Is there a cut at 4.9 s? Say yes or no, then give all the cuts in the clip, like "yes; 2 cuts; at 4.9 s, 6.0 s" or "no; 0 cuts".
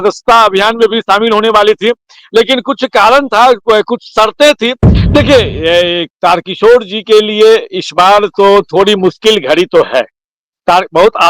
yes; 1 cut; at 4.9 s